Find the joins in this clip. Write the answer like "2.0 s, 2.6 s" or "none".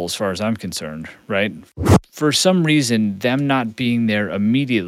1.7 s